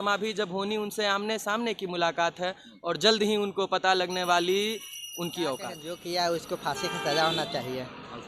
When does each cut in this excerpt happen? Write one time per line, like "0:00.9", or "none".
0:05.9